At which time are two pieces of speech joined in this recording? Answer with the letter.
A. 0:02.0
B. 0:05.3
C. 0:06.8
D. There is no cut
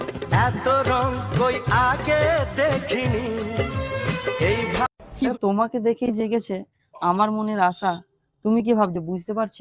B